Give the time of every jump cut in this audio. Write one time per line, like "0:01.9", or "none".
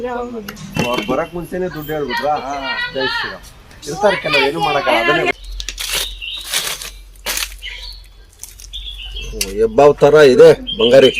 0:05.4